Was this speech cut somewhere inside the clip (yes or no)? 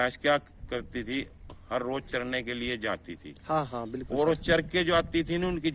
no